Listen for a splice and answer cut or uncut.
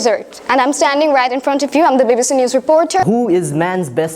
cut